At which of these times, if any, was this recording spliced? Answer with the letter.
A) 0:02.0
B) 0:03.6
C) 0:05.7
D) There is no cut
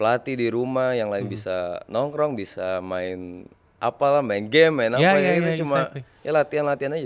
D